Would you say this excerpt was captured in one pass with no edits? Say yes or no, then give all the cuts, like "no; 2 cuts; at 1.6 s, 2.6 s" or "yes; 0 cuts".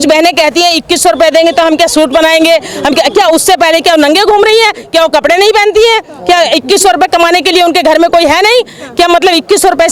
yes; 0 cuts